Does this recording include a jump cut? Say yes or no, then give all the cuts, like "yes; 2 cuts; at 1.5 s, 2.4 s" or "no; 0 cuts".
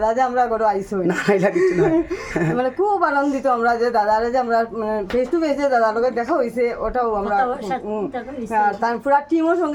no; 0 cuts